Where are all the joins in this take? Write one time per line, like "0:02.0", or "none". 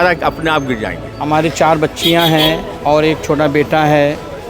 0:01.1